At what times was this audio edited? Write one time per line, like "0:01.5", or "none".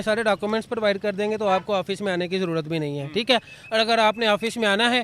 none